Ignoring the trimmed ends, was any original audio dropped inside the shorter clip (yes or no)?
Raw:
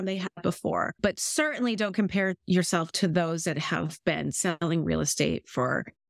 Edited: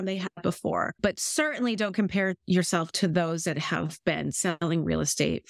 no